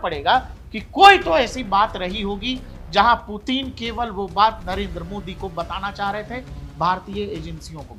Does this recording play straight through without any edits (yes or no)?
yes